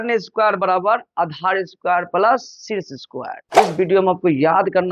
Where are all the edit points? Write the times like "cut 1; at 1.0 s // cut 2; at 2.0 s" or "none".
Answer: cut 1; at 3.4 s